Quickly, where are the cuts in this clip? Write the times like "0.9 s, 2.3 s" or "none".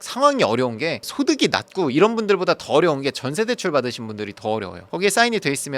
4.8 s